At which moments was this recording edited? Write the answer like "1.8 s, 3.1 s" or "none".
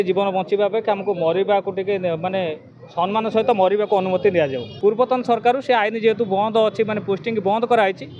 4.6 s